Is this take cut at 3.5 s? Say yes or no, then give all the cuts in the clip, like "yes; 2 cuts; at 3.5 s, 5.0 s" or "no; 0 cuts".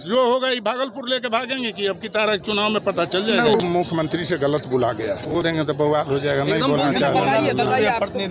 yes; 2 cuts; at 3.5 s, 5.4 s